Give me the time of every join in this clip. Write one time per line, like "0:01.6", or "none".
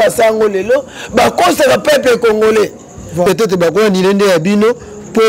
0:03.2

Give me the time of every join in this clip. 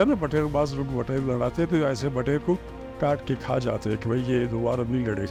none

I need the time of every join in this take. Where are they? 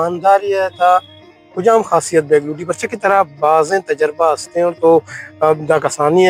none

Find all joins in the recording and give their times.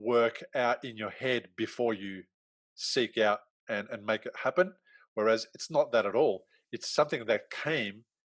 0:03.5

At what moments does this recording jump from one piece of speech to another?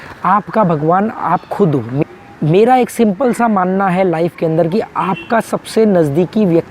0:02.0

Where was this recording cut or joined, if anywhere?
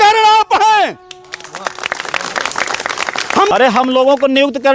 0:03.5

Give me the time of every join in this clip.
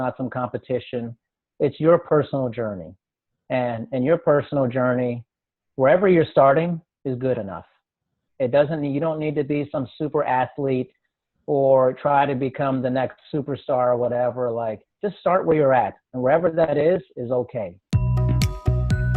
0:17.8

